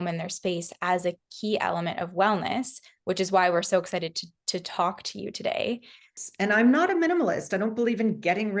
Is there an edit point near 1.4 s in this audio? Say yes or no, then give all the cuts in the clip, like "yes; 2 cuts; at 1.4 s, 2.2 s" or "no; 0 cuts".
no; 1 cut; at 6.0 s